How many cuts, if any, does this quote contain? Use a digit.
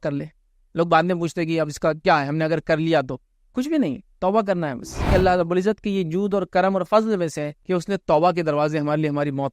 2